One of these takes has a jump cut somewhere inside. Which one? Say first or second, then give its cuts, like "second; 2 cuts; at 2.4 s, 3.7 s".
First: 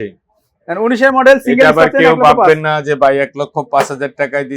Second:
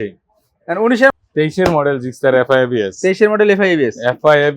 second; 1 cut; at 1.1 s